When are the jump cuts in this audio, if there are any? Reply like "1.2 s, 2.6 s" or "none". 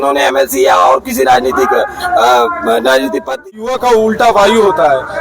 3.5 s